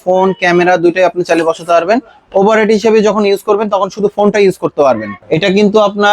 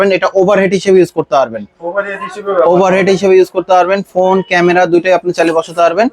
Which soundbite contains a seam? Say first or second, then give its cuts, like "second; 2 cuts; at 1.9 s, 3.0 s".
first; 1 cut; at 5.1 s